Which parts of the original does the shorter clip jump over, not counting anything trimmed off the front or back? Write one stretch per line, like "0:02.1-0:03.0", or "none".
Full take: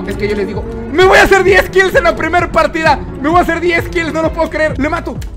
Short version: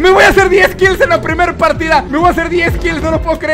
0:03.0-0:03.2